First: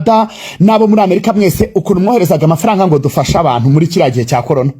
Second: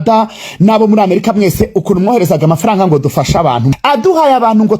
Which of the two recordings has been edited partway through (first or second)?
second